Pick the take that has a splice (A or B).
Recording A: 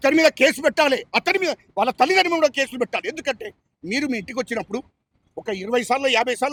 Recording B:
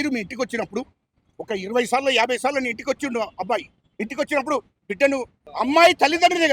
B